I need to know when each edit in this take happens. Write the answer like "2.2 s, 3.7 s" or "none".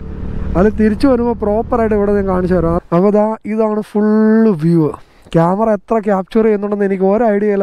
2.8 s